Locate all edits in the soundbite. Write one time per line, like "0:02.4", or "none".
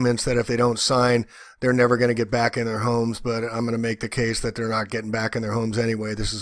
0:05.5